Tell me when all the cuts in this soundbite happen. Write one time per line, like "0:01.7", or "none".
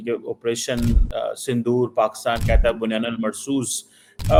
none